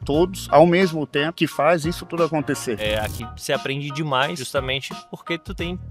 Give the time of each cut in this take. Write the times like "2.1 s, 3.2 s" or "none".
1.3 s, 2.8 s, 4.4 s